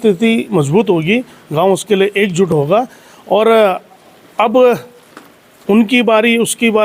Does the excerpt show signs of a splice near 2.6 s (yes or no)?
no